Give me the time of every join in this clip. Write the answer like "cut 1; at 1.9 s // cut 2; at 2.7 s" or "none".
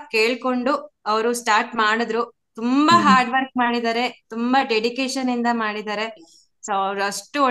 none